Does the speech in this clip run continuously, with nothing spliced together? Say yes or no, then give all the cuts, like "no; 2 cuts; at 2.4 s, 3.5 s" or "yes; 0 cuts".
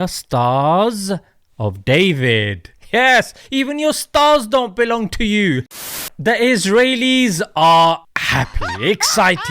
no; 1 cut; at 5.8 s